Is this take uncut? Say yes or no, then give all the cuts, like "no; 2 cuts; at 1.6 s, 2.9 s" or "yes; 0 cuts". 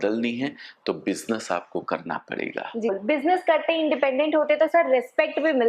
no; 1 cut; at 2.9 s